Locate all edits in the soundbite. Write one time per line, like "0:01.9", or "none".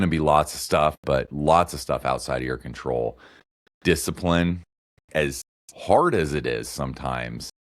0:01.0